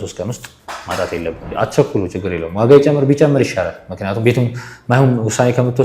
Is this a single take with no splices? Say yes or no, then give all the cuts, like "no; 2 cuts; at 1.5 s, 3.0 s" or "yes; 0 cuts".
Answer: no; 1 cut; at 1.5 s